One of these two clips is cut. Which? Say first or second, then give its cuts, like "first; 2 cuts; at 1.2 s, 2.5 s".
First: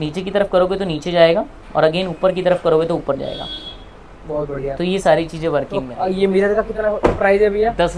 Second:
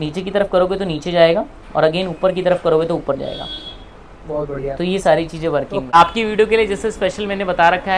second; 1 cut; at 5.9 s